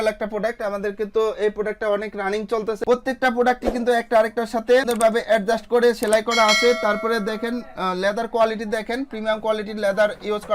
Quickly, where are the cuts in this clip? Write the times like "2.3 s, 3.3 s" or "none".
2.8 s